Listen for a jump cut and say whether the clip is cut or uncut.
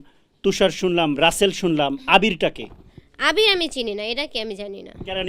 uncut